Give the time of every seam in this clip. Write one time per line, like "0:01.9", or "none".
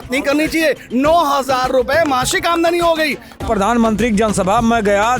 0:03.4